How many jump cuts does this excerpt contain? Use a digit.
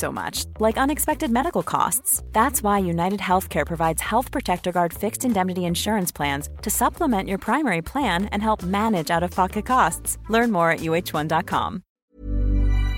1